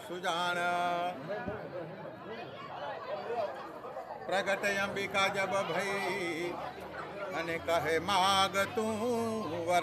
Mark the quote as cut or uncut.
uncut